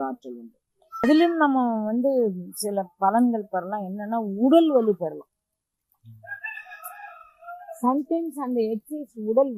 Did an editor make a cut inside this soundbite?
yes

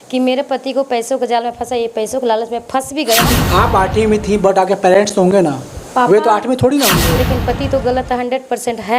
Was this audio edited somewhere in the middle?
yes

